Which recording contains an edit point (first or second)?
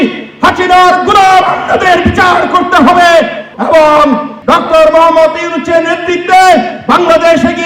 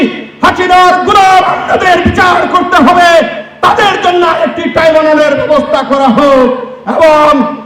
first